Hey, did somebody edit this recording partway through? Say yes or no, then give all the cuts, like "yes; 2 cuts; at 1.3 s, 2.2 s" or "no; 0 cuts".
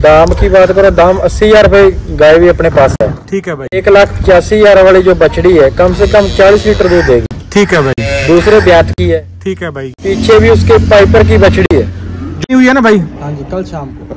yes; 1 cut; at 12.5 s